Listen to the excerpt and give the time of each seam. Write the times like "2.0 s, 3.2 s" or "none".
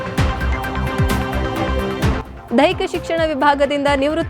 2.3 s